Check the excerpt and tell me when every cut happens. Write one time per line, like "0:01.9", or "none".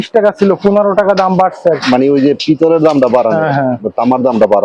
none